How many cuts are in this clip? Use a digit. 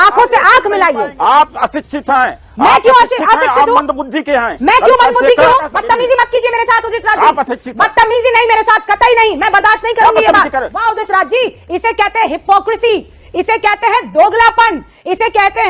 3